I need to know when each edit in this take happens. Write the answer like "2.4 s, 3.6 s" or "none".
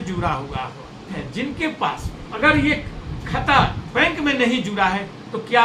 1.2 s, 2.2 s